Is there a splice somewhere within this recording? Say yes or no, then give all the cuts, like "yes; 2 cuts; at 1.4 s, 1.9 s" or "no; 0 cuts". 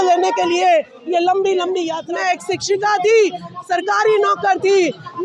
yes; 1 cut; at 2.0 s